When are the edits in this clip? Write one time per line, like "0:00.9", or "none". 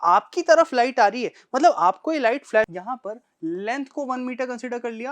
0:02.7